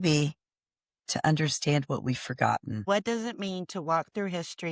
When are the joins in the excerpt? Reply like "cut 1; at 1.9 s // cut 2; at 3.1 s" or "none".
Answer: cut 1; at 2.8 s